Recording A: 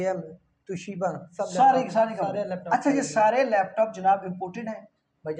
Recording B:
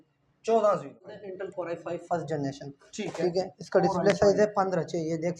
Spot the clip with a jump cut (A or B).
B